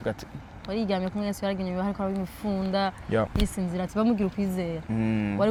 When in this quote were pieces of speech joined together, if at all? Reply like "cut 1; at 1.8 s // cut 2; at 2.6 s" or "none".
none